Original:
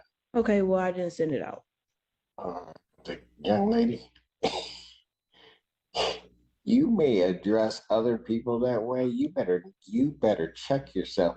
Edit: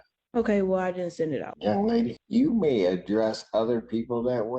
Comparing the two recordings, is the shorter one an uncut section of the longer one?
no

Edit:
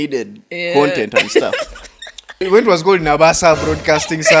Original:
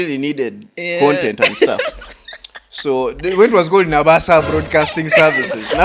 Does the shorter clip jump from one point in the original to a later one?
yes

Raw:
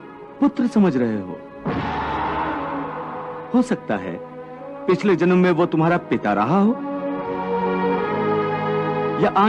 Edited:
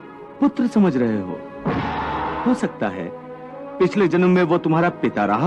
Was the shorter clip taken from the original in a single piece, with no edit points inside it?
no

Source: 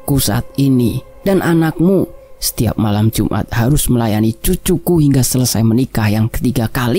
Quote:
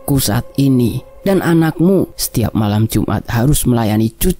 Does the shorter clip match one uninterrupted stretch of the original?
no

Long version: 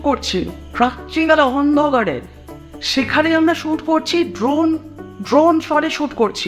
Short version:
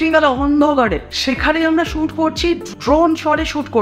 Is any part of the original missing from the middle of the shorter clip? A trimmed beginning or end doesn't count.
yes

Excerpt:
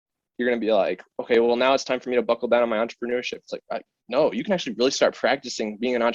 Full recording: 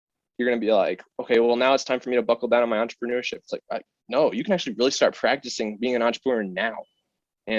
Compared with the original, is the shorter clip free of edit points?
yes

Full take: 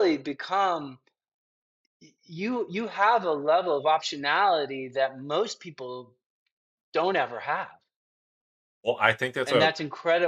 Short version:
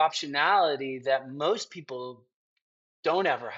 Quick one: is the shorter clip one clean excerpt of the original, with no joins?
yes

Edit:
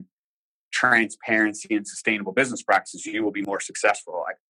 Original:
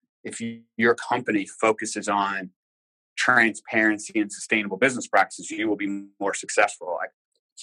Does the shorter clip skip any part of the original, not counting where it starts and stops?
yes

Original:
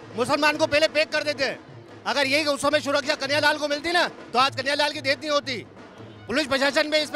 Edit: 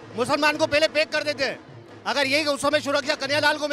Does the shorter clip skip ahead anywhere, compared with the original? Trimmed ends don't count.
no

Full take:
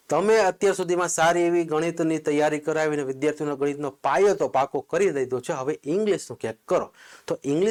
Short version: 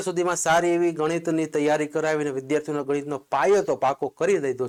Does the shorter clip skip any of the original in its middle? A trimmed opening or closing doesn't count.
no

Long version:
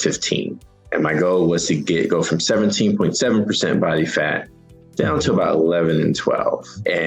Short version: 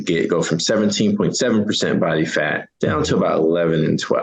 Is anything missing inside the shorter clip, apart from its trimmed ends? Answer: yes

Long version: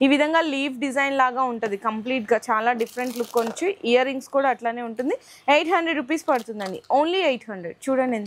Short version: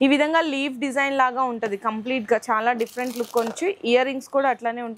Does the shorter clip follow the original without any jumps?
yes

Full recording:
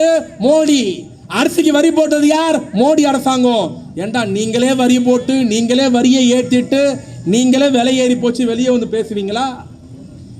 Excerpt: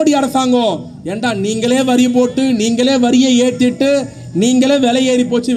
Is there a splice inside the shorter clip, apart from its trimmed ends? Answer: no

